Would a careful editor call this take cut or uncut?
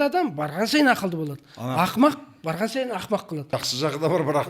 cut